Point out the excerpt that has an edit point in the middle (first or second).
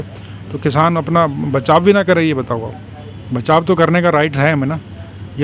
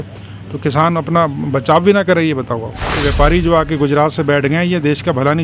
second